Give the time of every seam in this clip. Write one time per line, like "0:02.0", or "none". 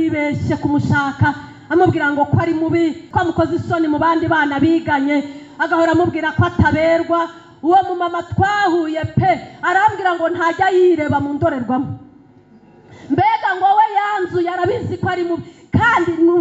0:03.0